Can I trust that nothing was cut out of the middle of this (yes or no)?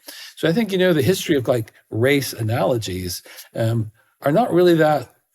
yes